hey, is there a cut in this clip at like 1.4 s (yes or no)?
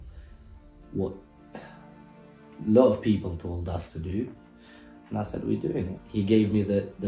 no